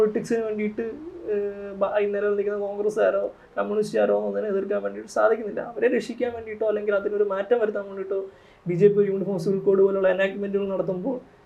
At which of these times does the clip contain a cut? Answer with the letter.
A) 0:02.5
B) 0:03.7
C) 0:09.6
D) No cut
D